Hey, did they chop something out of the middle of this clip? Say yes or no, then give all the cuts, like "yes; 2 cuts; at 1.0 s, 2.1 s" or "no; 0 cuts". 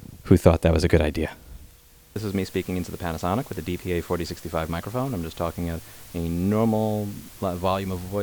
yes; 1 cut; at 2.0 s